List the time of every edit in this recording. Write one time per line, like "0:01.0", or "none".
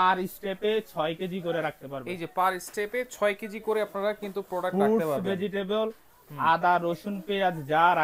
none